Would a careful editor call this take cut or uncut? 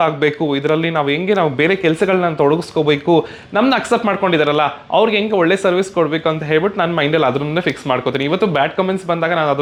uncut